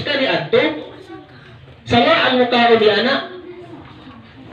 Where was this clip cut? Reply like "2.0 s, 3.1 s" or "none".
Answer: none